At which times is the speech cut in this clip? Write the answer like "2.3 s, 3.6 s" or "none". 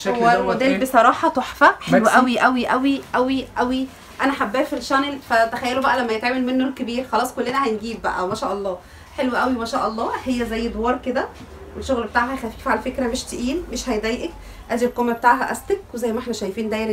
none